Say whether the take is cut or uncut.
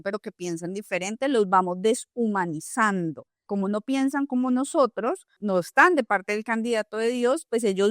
cut